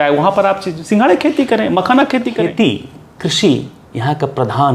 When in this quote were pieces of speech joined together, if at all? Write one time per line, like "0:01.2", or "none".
0:02.4

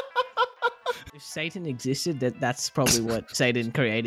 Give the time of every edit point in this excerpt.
0:01.2

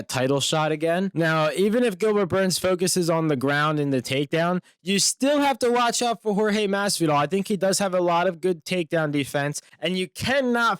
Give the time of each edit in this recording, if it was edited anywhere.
0:01.1

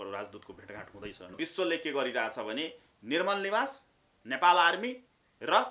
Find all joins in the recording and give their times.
0:01.3

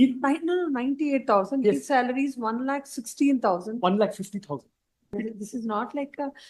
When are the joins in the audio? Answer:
0:05.1

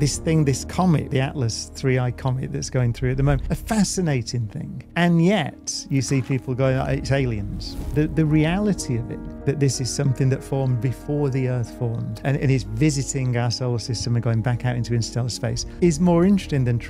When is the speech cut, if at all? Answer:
0:01.1
0:04.9
0:12.2

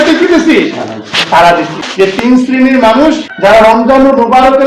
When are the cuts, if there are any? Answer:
0:02.2
0:03.3

